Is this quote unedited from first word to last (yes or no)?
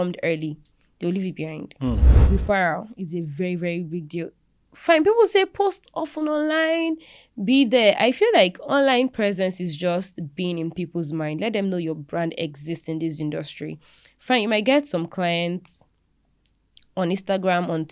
no